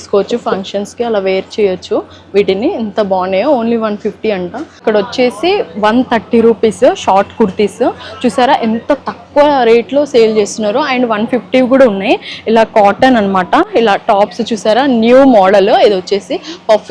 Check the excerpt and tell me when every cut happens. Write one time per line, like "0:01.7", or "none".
0:04.8
0:13.7